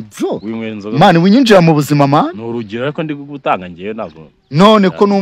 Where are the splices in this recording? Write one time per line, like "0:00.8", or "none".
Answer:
none